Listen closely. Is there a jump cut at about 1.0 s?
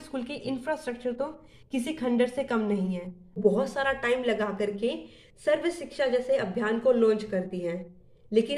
no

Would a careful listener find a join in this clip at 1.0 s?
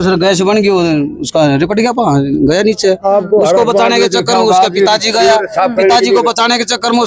yes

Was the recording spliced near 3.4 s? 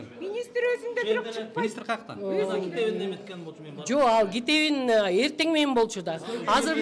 no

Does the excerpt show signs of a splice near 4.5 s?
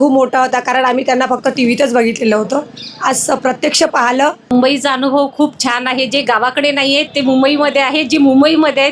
yes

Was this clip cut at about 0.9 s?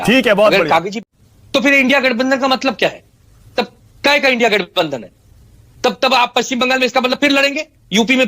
yes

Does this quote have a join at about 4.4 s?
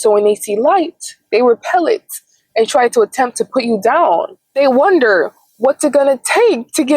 yes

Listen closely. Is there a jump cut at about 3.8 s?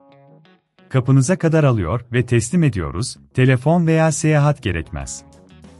no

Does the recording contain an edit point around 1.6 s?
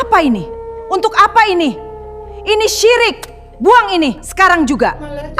no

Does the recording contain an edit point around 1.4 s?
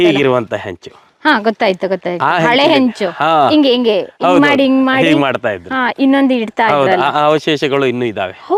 no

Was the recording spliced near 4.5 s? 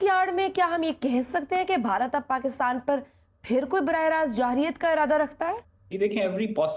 no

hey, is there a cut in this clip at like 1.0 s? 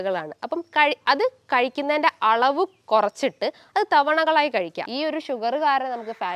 no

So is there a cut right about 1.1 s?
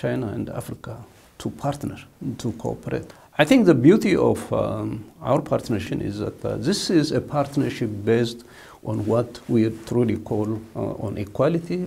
no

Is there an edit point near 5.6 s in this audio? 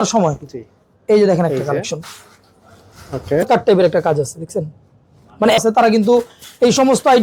yes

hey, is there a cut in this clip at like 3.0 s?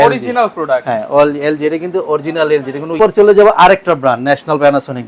yes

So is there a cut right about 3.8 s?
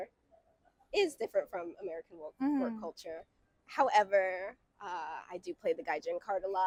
no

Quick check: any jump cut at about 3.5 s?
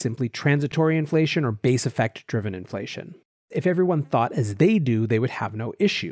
yes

